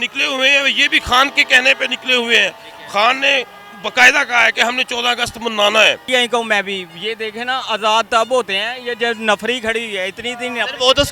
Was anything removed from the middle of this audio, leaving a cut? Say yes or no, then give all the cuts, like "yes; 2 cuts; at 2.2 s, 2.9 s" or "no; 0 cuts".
yes; 1 cut; at 6.0 s